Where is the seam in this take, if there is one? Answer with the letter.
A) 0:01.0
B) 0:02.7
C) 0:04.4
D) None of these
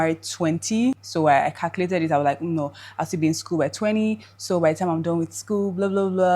A